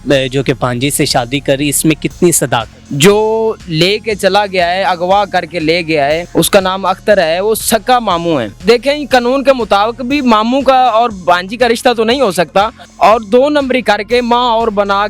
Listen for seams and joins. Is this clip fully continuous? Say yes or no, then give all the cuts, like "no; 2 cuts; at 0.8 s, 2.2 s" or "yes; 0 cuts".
no; 4 cuts; at 2.8 s, 6.2 s, 8.5 s, 12.8 s